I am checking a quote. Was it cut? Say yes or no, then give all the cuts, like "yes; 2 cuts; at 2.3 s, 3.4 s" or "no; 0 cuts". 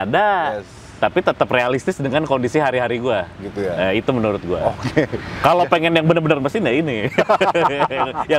no; 0 cuts